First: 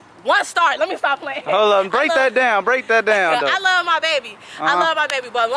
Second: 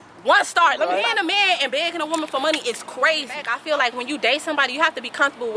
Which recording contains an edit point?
second; 2 cuts; at 1.1 s, 3.5 s

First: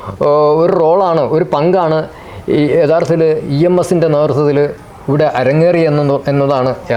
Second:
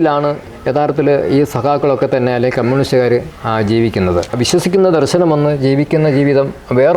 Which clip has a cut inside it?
second; 1 cut; at 4.3 s

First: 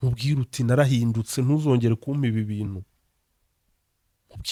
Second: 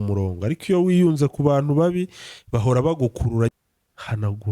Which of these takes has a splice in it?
second; 1 cut; at 3.5 s

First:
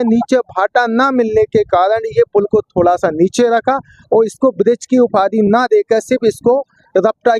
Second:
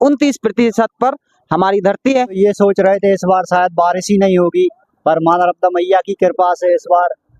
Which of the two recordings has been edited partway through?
second; 1 cut; at 2.4 s

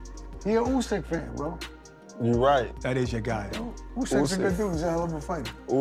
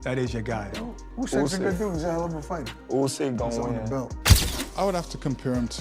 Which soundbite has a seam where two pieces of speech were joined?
second; 1 cut; at 4.2 s

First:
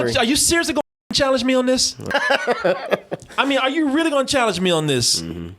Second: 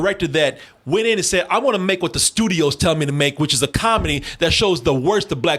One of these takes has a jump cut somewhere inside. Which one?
first; 1 cut; at 2.1 s

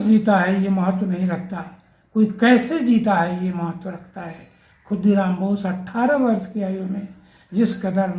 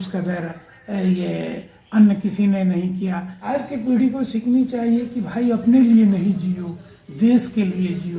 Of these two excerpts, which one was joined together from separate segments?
second; 1 cut; at 3.3 s

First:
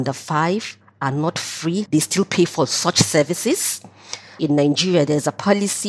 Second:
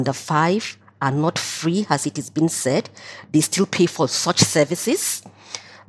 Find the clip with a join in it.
first; 2 cuts; at 1.9 s, 4.4 s

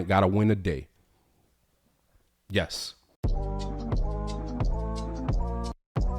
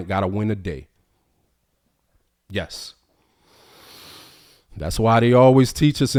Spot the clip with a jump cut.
first; 1 cut; at 3.1 s

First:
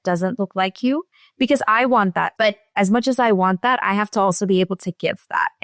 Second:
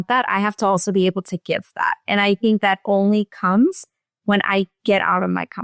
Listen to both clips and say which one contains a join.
first; 1 cut; at 2.3 s

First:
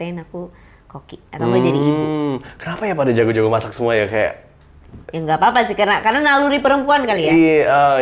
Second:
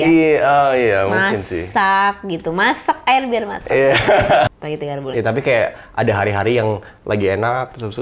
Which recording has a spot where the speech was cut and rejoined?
second; 1 cut; at 4.5 s

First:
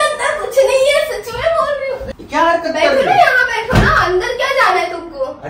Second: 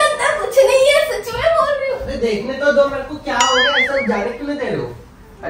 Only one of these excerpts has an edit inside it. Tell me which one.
first; 1 cut; at 2.1 s

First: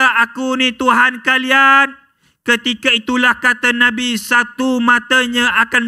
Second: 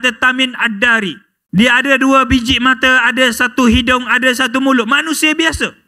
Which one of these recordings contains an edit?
second; 1 cut; at 1.3 s

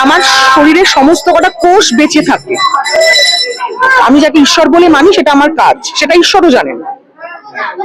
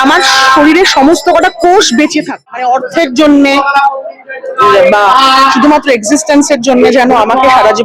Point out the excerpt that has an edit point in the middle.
second; 1 cut; at 2.6 s

